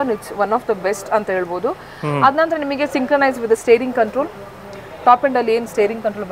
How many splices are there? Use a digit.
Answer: 0